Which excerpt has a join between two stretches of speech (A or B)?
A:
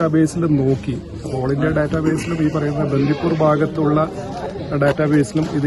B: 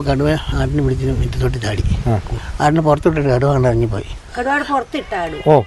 B